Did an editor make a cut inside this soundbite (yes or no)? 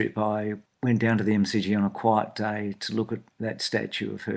yes